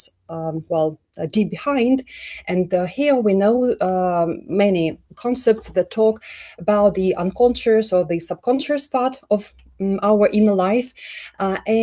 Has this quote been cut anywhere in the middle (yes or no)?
no